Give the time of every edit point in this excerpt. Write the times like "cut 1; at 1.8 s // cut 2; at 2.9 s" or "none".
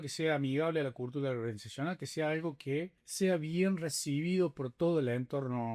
cut 1; at 3.0 s